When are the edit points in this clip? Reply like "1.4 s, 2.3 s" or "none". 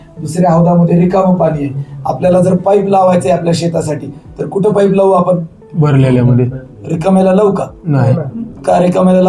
none